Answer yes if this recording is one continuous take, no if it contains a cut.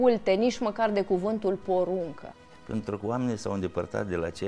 yes